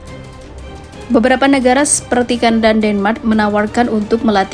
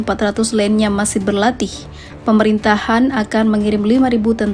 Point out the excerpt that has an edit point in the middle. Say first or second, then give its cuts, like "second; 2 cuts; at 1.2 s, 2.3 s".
first; 1 cut; at 1.1 s